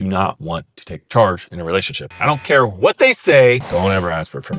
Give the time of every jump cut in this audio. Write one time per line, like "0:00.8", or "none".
0:03.6